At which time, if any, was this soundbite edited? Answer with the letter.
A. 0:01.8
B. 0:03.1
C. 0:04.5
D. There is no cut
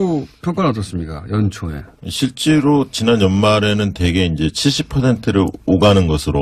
A